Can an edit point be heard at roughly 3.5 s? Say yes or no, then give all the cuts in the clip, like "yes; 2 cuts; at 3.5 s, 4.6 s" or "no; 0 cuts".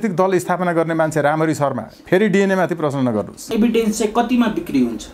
yes; 1 cut; at 3.5 s